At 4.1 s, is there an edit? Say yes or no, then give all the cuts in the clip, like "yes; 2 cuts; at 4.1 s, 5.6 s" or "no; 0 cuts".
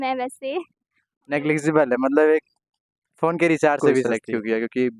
yes; 1 cut; at 4.1 s